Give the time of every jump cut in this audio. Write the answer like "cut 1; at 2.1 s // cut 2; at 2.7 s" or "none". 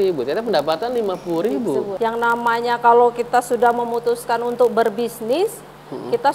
cut 1; at 1.9 s